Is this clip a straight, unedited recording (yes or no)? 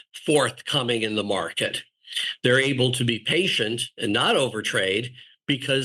yes